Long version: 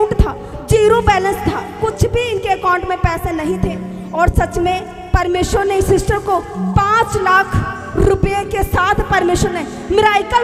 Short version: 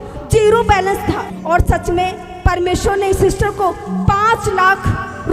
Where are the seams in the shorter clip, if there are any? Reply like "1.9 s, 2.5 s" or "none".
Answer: 1.3 s